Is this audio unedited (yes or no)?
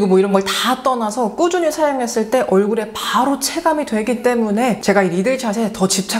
yes